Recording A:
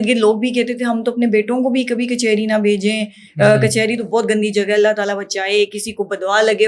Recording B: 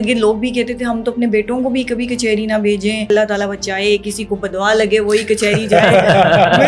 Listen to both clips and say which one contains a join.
B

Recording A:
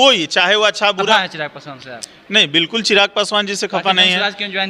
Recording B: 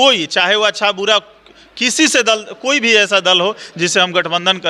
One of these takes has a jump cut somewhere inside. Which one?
A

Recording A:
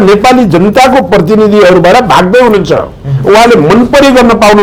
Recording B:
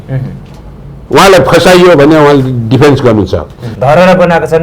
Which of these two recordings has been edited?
B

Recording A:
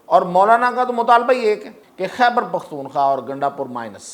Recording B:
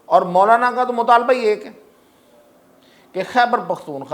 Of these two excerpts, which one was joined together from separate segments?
A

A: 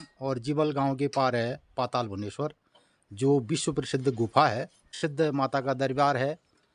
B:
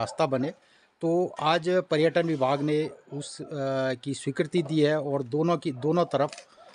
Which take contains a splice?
A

